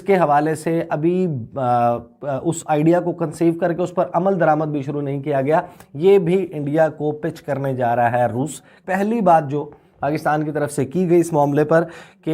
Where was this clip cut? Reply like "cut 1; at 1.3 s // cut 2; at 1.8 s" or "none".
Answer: cut 1; at 8.8 s